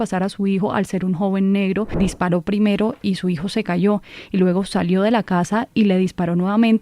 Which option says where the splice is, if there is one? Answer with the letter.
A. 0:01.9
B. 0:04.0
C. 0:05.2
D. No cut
A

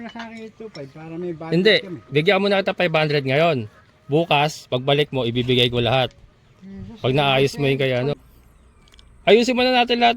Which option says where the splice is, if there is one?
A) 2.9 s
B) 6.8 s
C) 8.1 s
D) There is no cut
C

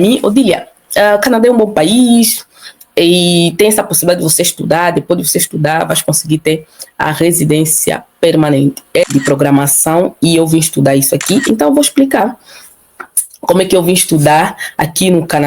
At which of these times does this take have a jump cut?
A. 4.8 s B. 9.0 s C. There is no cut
B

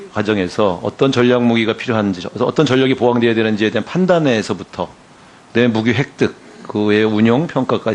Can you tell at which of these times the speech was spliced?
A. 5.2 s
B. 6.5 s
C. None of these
B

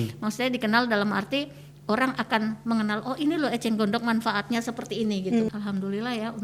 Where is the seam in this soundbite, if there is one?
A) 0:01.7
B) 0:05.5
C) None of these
B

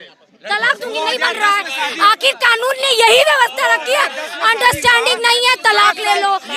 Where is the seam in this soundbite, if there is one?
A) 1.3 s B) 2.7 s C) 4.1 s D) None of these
D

